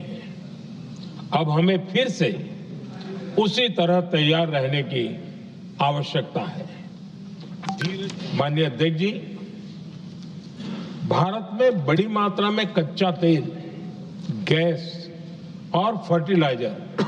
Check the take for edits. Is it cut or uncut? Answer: cut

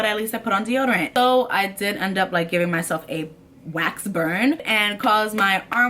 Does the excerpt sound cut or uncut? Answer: cut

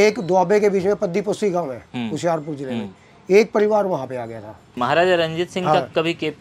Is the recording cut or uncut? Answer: cut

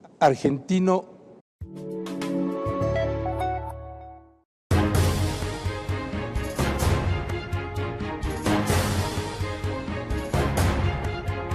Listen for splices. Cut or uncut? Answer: uncut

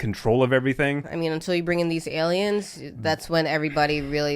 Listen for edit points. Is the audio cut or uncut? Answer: cut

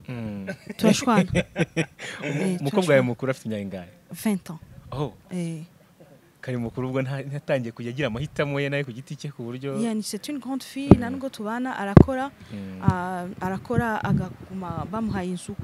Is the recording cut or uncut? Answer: uncut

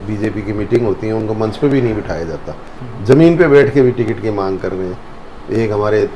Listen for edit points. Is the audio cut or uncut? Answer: uncut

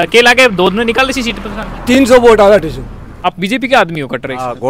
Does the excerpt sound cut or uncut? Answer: cut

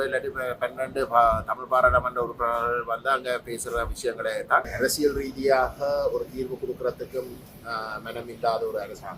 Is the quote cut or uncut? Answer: cut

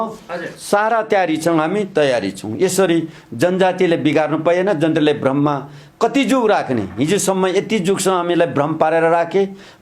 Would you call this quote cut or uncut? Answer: uncut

